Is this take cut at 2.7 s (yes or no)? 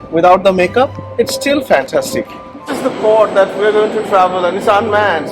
yes